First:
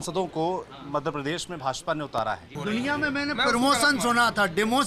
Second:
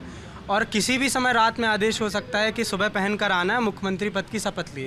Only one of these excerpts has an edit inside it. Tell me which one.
first; 1 cut; at 2.5 s

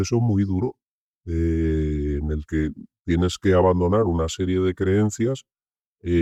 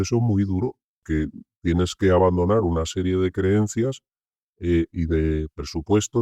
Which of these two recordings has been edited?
second; 1 cut; at 0.9 s

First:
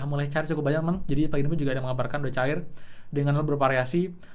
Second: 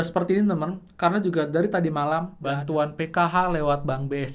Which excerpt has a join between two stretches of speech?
second; 1 cut; at 2.3 s

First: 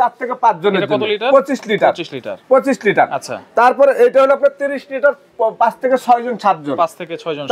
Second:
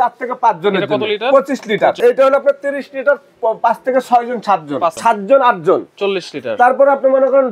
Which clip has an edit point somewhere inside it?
second; 2 cuts; at 2.0 s, 5.0 s

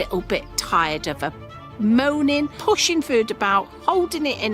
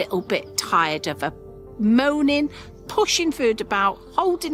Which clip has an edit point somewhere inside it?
first; 1 cut; at 2.5 s

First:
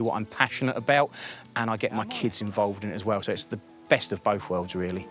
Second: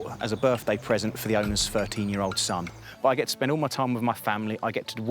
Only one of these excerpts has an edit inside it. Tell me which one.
second; 1 cut; at 2.9 s

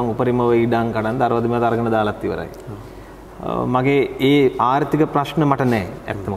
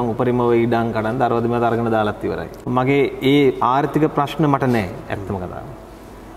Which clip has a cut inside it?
second; 1 cut; at 2.7 s

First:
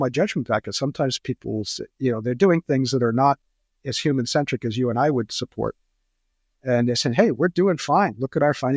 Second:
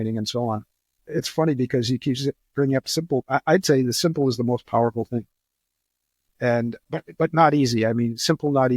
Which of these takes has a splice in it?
second; 1 cut; at 0.9 s

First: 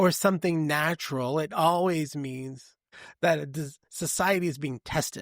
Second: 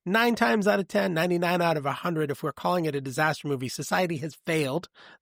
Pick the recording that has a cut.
first; 1 cut; at 2.8 s

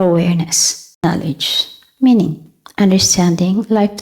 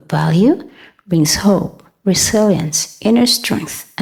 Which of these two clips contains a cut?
first; 1 cut; at 1.0 s

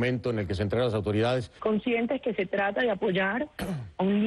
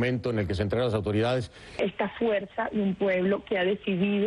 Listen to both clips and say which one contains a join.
first; 1 cut; at 1.5 s

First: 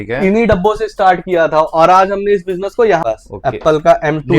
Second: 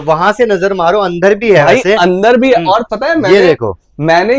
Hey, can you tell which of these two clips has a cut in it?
first; 1 cut; at 3.0 s

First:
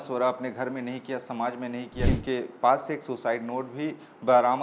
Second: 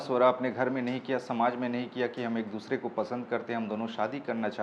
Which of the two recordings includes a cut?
first; 1 cut; at 2.1 s

